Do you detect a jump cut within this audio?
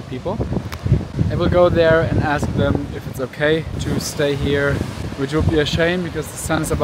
yes; 3 cuts; at 1.1 s, 3.8 s, 5.0 s

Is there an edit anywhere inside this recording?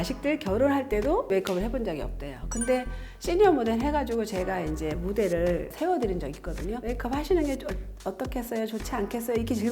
yes; 2 cuts; at 1.3 s, 5.7 s

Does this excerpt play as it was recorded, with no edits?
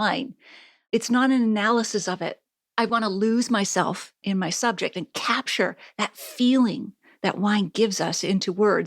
no; 1 cut; at 2.9 s

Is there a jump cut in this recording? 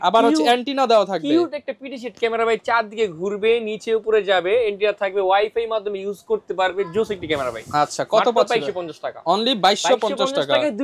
no; 0 cuts

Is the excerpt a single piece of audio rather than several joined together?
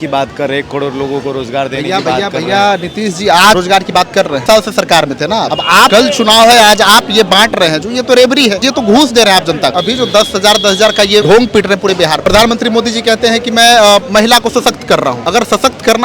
no; 7 cuts; at 4.0 s, 5.7 s, 8.7 s, 9.8 s, 11.2 s, 12.2 s, 15.2 s

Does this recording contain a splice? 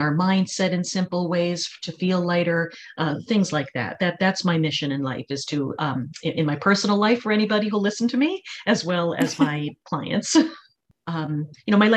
yes; 1 cut; at 10.9 s

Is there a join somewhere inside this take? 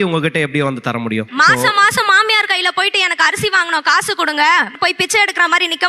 no; 0 cuts

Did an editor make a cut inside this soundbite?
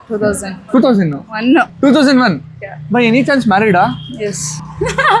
yes; 1 cut; at 1.7 s

